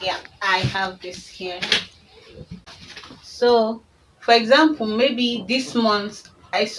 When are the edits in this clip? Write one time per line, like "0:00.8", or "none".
0:02.7